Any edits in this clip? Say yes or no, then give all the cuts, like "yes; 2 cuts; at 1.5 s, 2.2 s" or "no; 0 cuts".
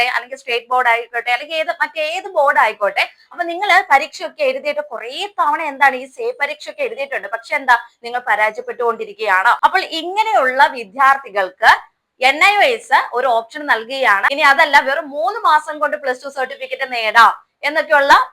yes; 2 cuts; at 9.6 s, 14.3 s